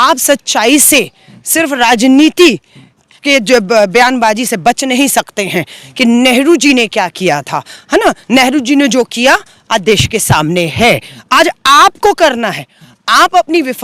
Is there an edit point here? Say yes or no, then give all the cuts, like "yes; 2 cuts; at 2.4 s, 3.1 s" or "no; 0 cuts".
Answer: no; 0 cuts